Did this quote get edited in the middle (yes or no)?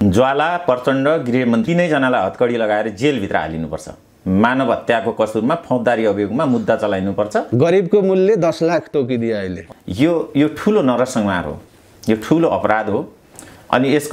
yes